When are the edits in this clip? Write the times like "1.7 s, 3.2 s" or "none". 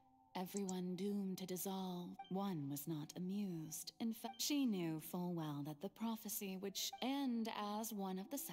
2.2 s, 4.2 s, 6.9 s